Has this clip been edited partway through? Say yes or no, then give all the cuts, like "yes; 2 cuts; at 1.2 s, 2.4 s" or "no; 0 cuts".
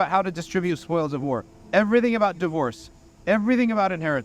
no; 0 cuts